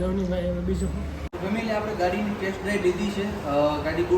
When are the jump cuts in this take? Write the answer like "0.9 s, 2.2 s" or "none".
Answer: 1.2 s